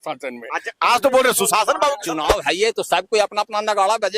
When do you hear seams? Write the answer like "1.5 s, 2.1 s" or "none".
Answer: 2.2 s